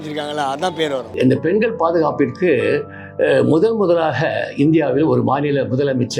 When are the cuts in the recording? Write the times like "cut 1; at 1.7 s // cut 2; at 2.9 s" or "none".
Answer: cut 1; at 1.1 s